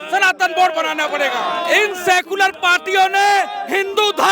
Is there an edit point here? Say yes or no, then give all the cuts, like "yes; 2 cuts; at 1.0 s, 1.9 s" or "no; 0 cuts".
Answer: yes; 1 cut; at 1.4 s